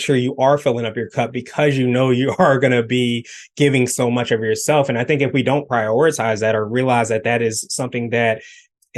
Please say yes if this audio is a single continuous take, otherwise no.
yes